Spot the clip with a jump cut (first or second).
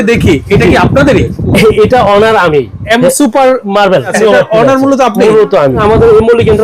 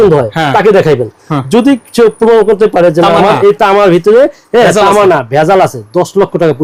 first